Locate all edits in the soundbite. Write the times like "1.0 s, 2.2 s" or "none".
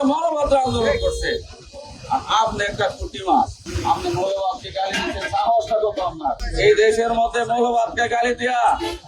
3.6 s, 6.5 s